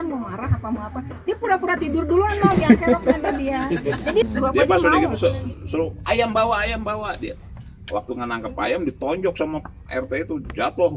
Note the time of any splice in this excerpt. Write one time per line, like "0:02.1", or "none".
0:04.3